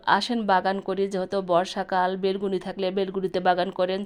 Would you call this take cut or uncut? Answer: uncut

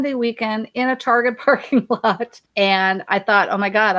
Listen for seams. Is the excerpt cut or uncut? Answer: cut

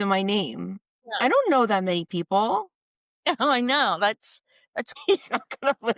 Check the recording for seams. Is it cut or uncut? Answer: cut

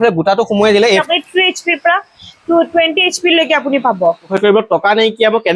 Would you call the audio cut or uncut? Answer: cut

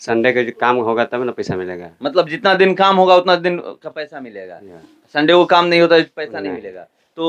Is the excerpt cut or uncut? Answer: uncut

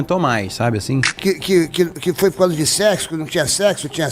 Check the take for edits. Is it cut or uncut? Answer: cut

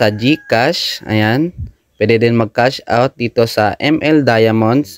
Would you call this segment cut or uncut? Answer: uncut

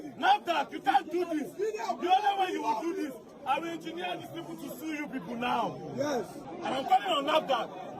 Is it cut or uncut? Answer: cut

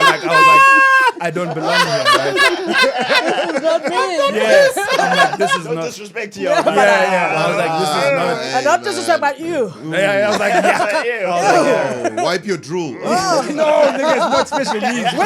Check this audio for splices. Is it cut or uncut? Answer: uncut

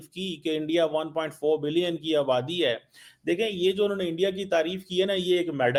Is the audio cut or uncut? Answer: uncut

